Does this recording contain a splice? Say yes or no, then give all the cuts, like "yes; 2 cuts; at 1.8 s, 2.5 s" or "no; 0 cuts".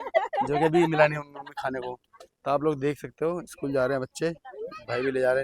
no; 0 cuts